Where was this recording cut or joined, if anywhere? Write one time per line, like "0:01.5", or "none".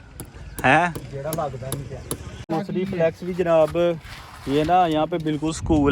0:02.4